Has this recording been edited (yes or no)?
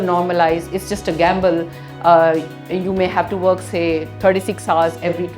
no